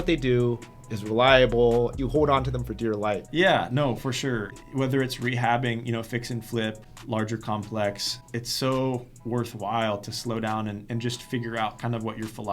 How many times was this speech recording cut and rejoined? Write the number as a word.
five